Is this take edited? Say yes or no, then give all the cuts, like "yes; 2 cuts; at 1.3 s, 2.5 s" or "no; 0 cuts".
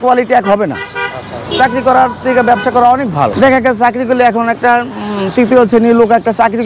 yes; 2 cuts; at 1.4 s, 3.3 s